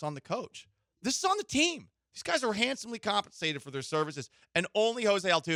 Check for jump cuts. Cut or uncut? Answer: uncut